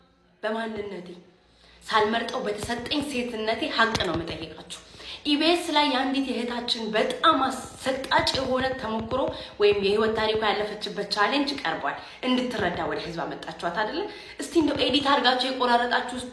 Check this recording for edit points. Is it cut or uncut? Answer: uncut